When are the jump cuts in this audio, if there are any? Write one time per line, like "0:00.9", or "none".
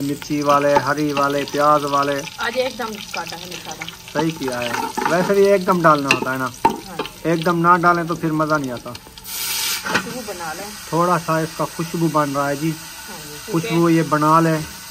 0:02.3
0:09.7